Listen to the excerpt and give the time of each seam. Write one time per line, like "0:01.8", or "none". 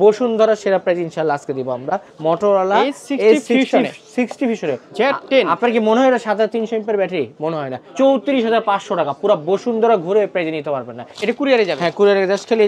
0:02.1
0:04.8
0:07.8
0:11.1